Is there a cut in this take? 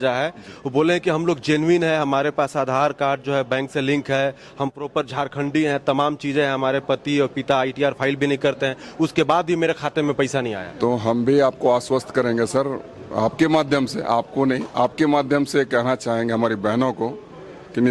no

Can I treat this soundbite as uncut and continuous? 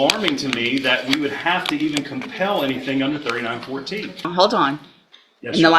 no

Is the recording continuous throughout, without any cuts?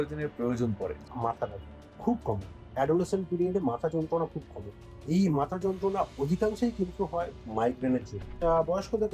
no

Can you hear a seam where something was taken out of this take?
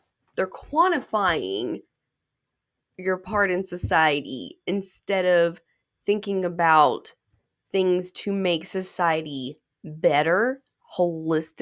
no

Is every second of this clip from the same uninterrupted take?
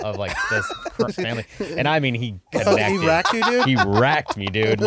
yes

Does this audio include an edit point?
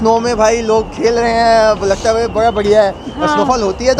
no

